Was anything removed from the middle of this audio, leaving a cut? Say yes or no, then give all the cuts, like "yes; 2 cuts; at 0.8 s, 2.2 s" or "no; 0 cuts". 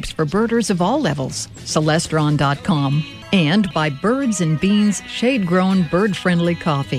yes; 1 cut; at 3.1 s